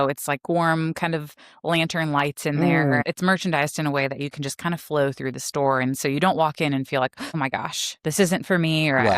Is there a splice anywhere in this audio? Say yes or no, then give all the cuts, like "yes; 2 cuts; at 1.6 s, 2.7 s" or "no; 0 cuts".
yes; 2 cuts; at 3.0 s, 7.2 s